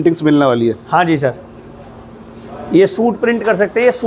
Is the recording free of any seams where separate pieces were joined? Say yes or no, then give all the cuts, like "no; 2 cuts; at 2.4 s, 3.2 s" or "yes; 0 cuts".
yes; 0 cuts